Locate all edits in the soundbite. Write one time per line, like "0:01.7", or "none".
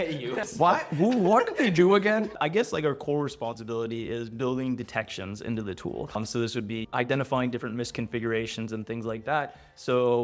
none